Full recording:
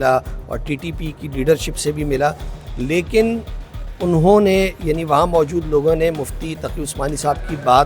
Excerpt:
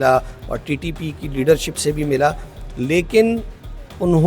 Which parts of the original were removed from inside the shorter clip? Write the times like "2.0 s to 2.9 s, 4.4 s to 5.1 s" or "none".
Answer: none